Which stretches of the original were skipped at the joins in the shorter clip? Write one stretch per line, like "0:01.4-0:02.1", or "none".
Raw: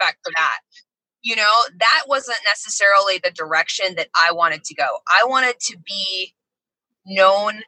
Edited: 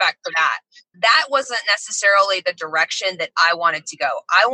0:00.9-0:01.7